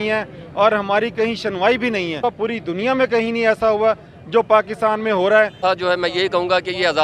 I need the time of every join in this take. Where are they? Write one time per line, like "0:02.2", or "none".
0:02.2
0:05.6

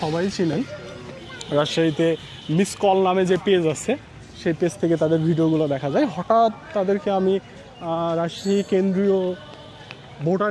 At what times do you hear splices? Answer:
none

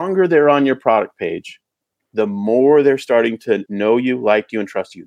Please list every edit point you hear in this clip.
0:03.7

